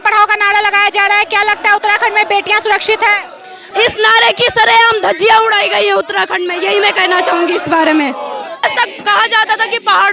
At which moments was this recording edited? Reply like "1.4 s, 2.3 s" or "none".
3.6 s, 8.6 s